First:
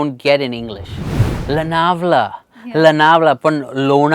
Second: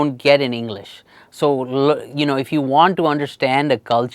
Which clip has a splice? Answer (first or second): first